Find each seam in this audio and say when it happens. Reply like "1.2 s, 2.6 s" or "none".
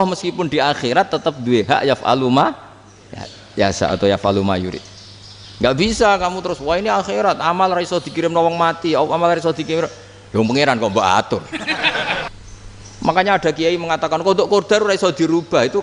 12.3 s